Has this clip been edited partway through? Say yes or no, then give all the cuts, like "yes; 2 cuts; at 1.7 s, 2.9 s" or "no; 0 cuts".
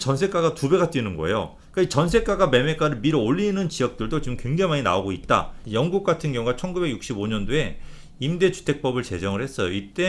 yes; 1 cut; at 5.6 s